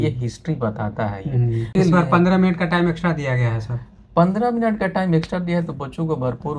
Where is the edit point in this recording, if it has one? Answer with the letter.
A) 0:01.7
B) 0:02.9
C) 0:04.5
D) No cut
A